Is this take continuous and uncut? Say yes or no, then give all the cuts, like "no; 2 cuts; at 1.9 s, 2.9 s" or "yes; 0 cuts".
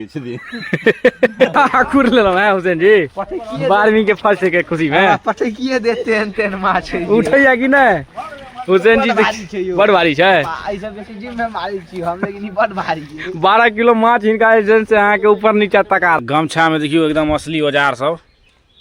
no; 2 cuts; at 1.5 s, 16.2 s